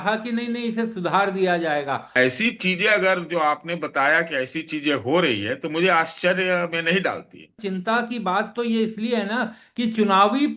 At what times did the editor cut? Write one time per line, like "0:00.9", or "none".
0:02.1
0:07.6